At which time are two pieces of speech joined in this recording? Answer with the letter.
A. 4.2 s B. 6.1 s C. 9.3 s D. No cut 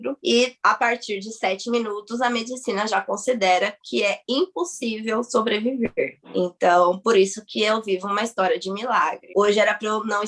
C